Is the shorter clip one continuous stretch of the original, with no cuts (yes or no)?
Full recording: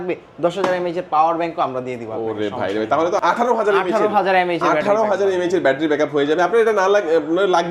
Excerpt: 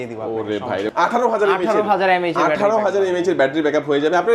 no